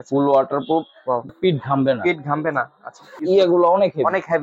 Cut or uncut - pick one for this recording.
cut